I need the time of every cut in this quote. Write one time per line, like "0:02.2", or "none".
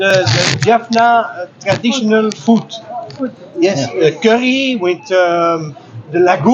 none